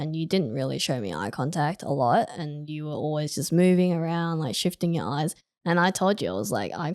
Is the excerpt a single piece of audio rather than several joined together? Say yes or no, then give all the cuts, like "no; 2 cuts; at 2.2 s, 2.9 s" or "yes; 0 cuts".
yes; 0 cuts